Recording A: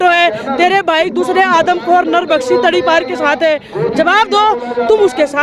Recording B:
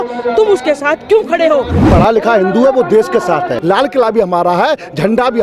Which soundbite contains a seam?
B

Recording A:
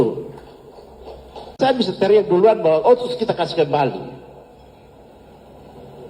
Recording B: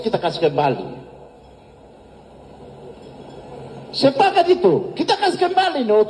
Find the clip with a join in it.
A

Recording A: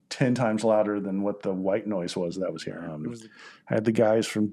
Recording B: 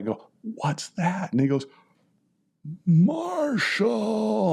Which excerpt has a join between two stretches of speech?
A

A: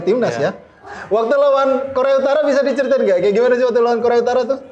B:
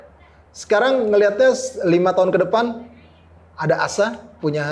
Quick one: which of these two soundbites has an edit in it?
A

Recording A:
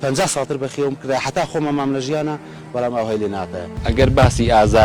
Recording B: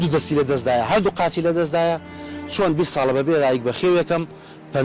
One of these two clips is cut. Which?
A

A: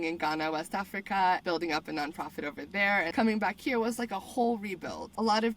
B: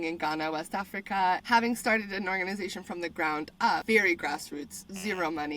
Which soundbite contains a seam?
B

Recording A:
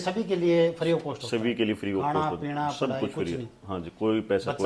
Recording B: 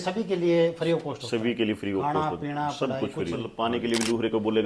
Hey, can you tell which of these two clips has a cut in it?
B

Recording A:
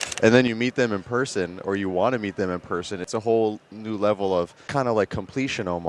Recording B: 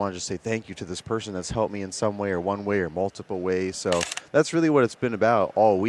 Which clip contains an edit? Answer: A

